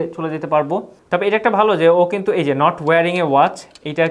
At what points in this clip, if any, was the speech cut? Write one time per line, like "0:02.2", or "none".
0:00.9